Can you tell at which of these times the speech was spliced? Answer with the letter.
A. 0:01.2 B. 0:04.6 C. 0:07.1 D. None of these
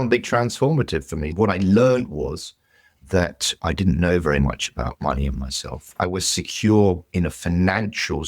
A